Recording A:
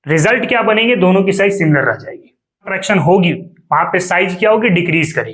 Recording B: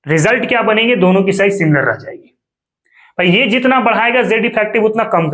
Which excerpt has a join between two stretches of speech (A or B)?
A